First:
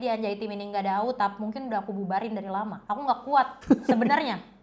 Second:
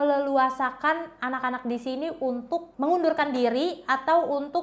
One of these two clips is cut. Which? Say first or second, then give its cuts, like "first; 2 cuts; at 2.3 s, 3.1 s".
first; 2 cuts; at 2.8 s, 3.6 s